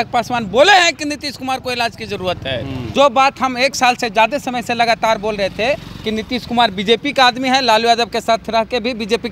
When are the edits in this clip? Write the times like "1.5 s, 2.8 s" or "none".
2.8 s